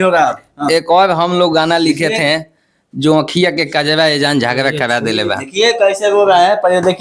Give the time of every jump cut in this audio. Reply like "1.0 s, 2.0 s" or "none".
none